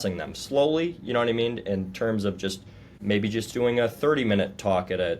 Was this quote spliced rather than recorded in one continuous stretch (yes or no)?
yes